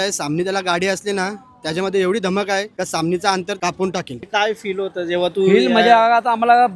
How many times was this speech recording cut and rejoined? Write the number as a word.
one